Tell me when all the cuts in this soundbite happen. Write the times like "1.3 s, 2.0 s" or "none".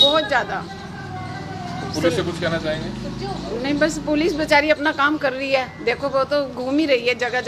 none